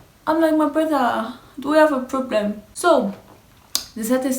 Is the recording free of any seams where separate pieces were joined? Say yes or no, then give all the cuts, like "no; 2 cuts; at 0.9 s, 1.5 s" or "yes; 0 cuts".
no; 1 cut; at 2.7 s